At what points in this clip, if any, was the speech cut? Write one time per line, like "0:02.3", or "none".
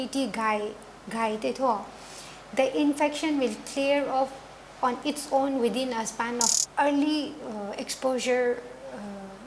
0:06.5